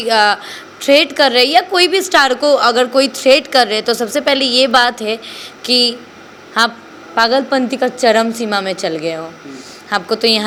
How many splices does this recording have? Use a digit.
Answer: 0